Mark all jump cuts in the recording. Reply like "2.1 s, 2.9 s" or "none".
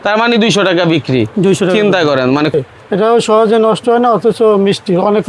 2.5 s